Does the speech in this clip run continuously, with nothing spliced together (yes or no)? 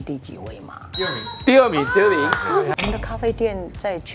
no